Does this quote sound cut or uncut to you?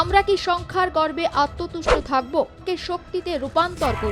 cut